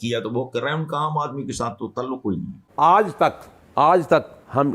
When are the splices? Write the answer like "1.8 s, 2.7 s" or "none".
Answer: 2.6 s